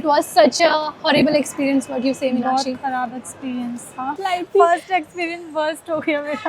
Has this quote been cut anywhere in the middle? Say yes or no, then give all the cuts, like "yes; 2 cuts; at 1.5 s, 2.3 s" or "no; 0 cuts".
yes; 1 cut; at 4.2 s